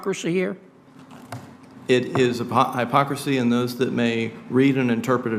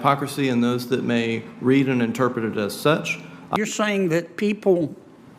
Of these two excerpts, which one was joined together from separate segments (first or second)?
second